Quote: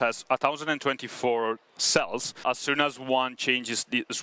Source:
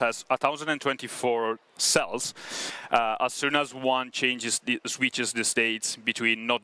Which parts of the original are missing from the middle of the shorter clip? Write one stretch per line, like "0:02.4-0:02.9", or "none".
0:02.4-0:03.2